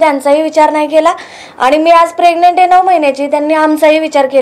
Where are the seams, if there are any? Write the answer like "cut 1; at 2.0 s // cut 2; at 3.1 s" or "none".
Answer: none